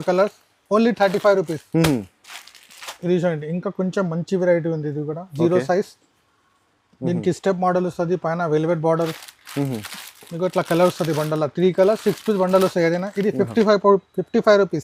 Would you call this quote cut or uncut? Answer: uncut